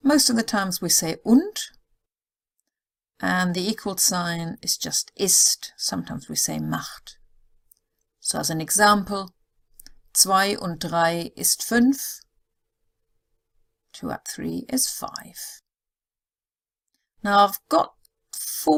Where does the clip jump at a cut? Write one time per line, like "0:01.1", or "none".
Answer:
none